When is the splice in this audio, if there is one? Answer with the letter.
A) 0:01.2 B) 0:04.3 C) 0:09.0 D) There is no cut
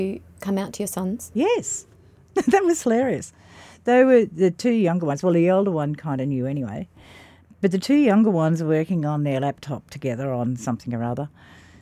A